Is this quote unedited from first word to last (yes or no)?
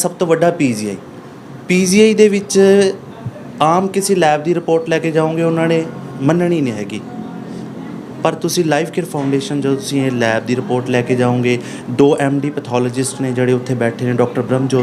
yes